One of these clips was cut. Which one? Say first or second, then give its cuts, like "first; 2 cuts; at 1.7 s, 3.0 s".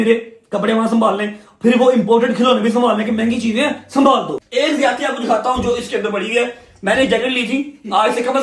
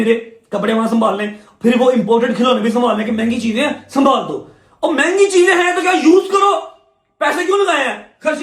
first; 1 cut; at 4.4 s